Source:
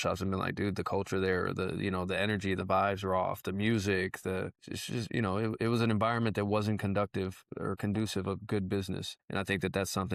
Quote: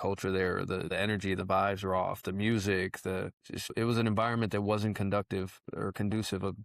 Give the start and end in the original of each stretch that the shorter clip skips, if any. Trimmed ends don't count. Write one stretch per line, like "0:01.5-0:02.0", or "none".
0:01.8-0:02.1
0:04.9-0:05.5